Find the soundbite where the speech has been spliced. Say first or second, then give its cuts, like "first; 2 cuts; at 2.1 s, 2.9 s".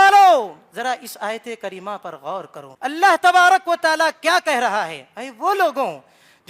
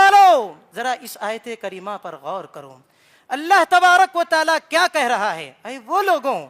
first; 1 cut; at 2.6 s